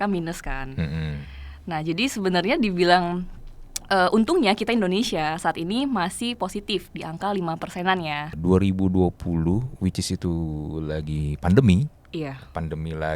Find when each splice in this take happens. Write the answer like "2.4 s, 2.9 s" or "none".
8.3 s